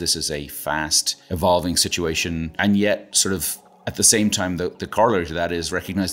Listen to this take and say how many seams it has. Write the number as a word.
two